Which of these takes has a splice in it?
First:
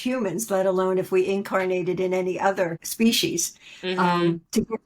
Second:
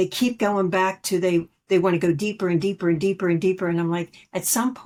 first; 1 cut; at 2.8 s

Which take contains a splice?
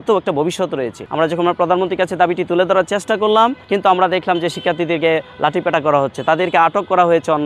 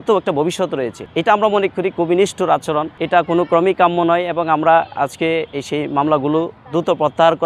first; 2 cuts; at 1.0 s, 3.6 s

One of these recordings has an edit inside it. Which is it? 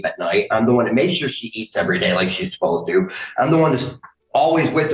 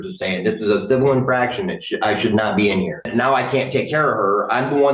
second; 1 cut; at 3.1 s

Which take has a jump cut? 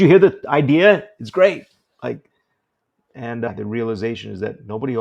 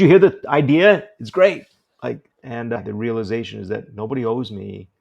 second; 1 cut; at 2.3 s

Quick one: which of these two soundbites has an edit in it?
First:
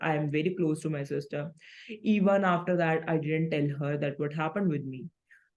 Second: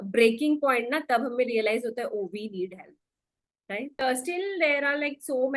second; 1 cut; at 4.0 s

